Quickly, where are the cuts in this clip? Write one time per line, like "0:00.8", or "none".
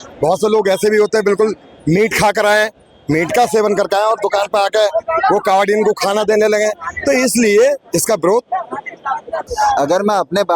0:09.4